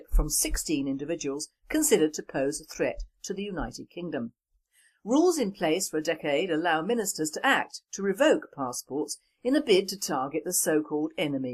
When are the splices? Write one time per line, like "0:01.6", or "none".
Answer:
0:06.5